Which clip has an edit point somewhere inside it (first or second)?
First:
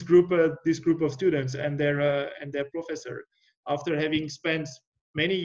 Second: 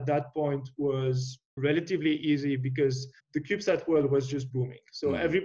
second